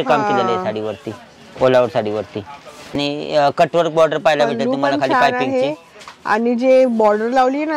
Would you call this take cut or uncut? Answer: cut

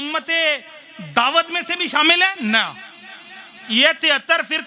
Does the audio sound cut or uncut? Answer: uncut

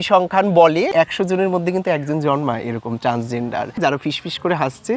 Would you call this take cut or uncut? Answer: cut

